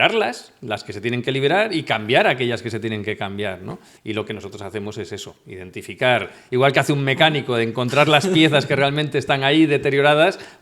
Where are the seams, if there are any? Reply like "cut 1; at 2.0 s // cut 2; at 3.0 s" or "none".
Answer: cut 1; at 3.9 s

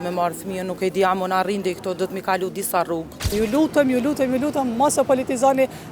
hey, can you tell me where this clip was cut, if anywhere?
cut 1; at 3.3 s

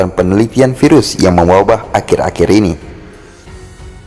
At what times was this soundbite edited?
cut 1; at 3.0 s

